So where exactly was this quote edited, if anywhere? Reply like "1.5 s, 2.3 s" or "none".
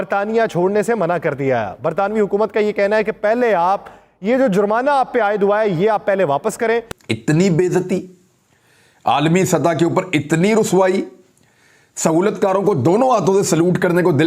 6.9 s

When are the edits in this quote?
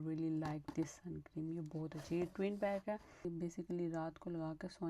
3.3 s

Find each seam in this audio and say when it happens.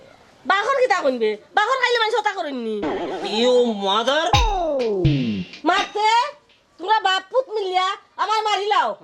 2.8 s

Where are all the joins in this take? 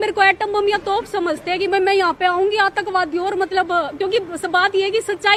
none

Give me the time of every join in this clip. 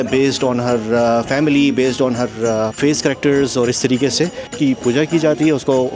2.8 s, 4.5 s

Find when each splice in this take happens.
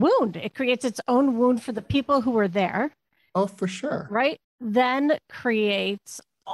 4.4 s

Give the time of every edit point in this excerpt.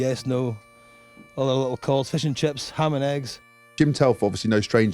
3.7 s

